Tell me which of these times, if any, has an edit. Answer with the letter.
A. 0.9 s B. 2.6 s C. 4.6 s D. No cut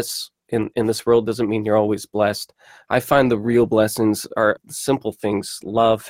C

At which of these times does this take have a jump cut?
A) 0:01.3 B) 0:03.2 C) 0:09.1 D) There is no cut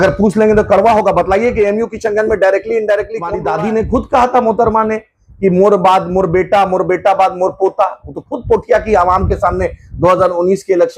B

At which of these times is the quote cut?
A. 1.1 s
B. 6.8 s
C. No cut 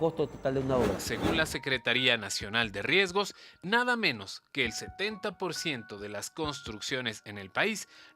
A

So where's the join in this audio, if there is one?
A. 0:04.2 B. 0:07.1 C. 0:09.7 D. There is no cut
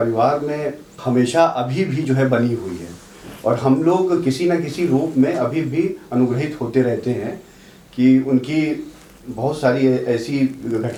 D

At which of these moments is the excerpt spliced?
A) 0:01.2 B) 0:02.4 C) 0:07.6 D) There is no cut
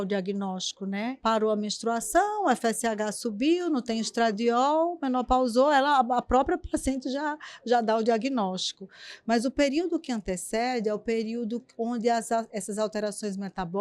A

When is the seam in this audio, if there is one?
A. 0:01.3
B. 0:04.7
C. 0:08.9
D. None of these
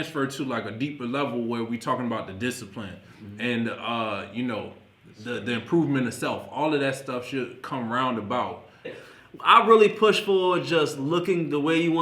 C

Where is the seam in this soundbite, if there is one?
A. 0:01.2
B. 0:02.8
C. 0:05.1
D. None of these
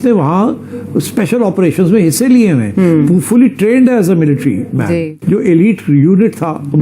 C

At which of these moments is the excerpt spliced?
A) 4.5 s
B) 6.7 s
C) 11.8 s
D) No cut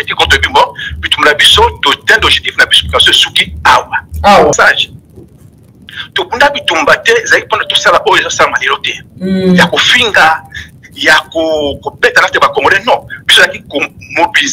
A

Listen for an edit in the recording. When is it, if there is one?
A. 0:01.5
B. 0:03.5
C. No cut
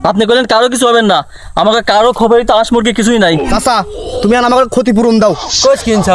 B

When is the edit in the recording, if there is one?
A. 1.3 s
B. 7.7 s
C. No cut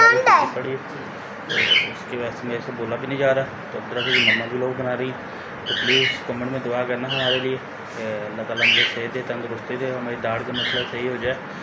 C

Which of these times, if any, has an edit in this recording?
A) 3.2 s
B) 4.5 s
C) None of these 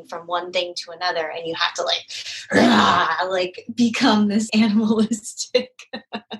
B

